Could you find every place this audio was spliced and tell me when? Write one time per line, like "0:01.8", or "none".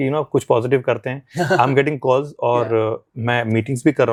none